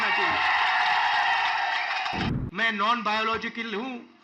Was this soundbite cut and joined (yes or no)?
yes